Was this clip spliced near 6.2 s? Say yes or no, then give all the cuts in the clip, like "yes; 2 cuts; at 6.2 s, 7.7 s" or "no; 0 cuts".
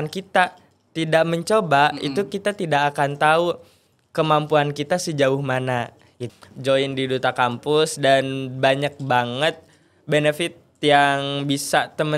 yes; 1 cut; at 6.2 s